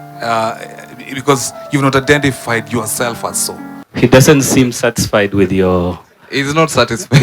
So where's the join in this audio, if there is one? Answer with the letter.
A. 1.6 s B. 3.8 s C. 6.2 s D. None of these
B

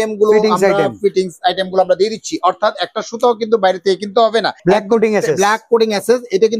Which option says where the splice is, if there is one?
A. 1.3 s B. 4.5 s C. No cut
B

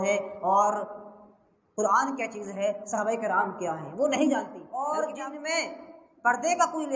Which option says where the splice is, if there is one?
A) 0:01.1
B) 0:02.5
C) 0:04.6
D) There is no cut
C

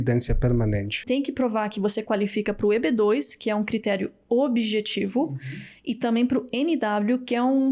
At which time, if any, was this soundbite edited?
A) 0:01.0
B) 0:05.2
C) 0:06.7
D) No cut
A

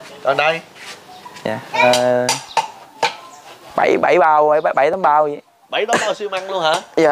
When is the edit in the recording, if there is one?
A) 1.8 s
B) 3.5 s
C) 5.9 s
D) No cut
A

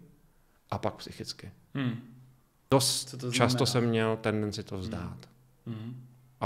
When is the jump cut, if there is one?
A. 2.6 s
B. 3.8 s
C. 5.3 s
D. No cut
A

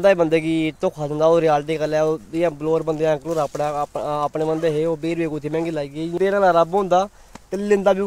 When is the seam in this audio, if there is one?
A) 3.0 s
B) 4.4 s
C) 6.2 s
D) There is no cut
D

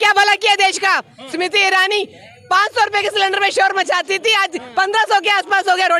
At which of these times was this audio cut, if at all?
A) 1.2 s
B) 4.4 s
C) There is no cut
C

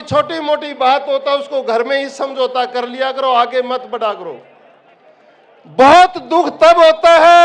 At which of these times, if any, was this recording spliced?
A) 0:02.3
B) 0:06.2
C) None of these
C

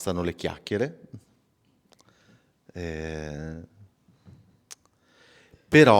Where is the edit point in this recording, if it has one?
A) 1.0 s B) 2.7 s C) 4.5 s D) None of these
D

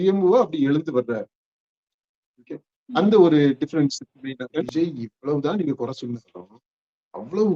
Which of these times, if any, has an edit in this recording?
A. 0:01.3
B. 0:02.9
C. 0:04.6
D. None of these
C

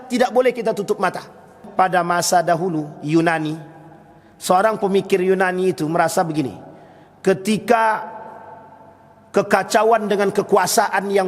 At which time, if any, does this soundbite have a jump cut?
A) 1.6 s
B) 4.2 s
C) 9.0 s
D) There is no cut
A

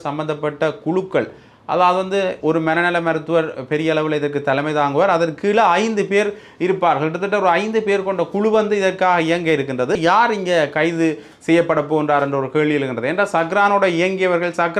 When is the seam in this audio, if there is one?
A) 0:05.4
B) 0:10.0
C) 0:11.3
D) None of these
B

